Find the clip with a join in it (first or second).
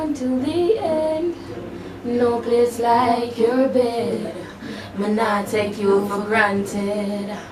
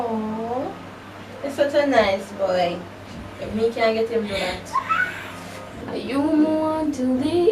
second